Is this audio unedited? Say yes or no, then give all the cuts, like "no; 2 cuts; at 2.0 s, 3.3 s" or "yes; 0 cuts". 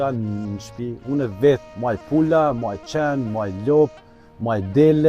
no; 1 cut; at 1.7 s